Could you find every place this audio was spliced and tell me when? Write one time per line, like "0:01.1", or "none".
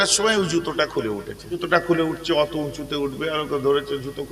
0:01.6